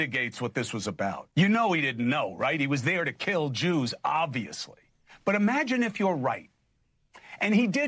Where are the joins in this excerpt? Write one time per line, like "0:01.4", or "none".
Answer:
0:01.2